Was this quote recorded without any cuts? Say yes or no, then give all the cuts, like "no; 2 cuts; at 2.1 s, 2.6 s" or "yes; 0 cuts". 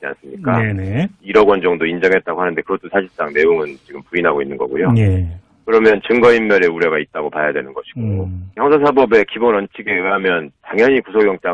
no; 1 cut; at 1.8 s